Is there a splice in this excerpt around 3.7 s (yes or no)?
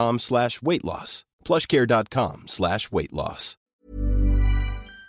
yes